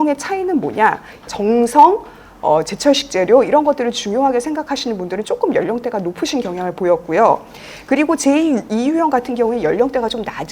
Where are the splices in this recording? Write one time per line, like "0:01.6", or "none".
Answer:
0:01.2